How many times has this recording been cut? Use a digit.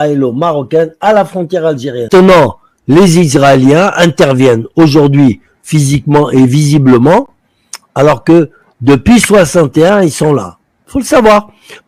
0